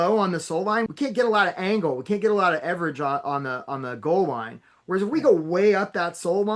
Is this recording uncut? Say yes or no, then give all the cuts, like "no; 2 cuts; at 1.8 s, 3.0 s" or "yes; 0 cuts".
no; 1 cut; at 0.9 s